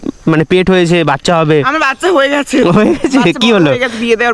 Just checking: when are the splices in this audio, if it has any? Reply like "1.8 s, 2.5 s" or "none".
none

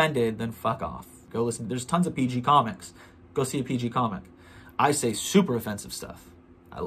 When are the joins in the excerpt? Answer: 1.2 s

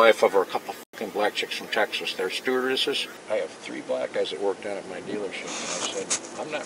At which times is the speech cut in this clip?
none

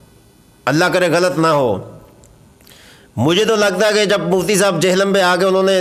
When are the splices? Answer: none

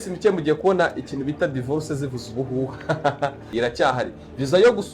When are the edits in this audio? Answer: 3.4 s

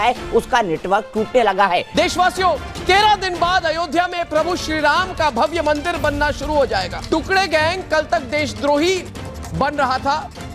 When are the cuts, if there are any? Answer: 1.9 s, 7.0 s

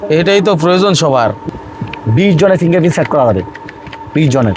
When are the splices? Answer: 1.4 s

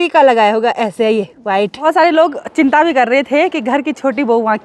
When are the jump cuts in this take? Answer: 1.8 s

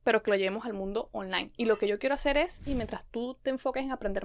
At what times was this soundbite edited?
2.7 s

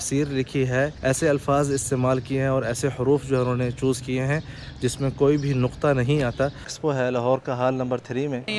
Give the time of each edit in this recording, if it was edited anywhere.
0.9 s, 6.7 s

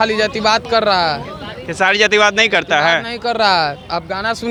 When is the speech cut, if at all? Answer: none

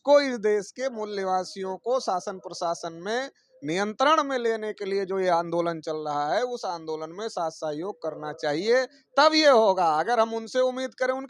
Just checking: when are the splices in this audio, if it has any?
none

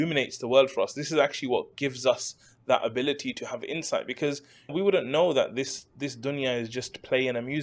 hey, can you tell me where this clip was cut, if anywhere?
4.7 s

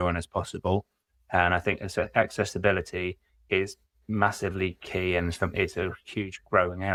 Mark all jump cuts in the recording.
none

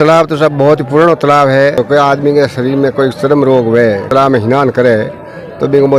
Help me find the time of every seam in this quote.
1.8 s, 4.1 s

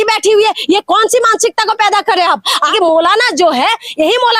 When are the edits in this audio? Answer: 2.6 s

